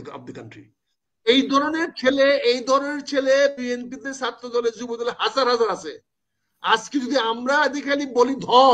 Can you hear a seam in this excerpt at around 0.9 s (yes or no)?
yes